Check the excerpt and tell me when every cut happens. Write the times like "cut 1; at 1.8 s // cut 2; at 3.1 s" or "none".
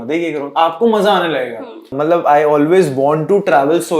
cut 1; at 2.0 s